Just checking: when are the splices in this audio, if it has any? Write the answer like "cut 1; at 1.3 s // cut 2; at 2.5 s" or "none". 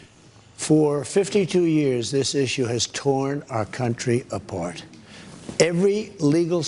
cut 1; at 1.2 s // cut 2; at 5.0 s